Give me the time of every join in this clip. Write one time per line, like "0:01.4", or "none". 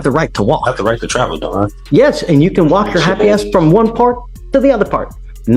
0:01.8